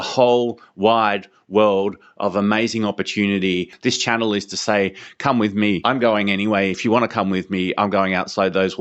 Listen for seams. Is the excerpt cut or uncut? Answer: cut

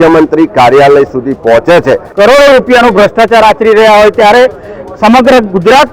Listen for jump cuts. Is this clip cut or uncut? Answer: cut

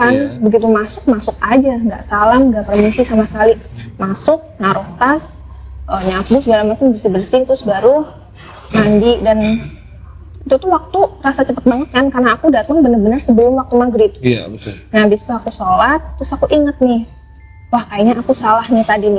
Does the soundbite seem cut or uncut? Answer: uncut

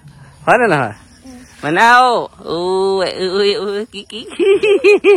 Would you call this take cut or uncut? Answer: uncut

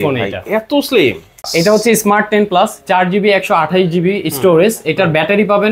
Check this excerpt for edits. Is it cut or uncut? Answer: cut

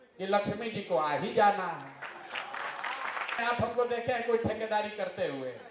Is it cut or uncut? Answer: cut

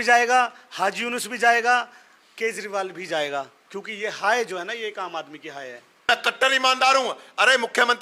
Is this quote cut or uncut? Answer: cut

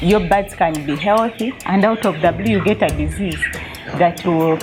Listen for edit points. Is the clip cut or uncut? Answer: uncut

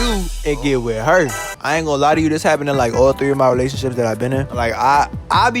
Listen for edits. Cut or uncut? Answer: cut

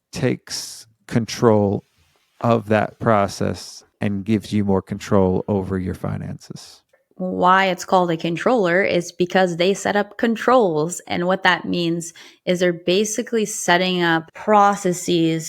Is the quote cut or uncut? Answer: cut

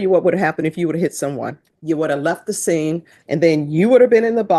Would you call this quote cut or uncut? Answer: cut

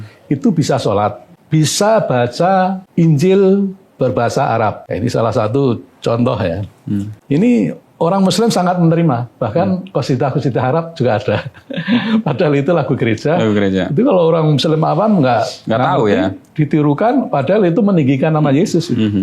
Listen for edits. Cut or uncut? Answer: cut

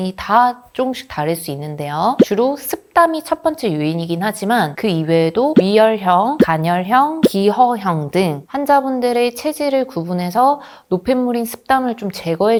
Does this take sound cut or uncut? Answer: uncut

